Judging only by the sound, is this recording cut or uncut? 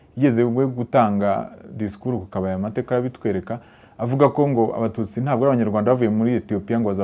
uncut